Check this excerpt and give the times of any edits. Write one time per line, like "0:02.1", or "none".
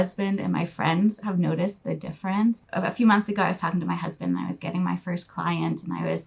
none